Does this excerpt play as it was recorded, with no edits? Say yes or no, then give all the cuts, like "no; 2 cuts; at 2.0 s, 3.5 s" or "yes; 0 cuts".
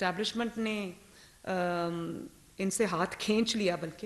yes; 0 cuts